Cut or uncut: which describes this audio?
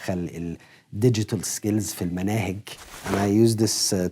cut